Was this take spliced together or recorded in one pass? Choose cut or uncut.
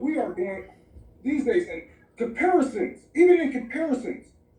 cut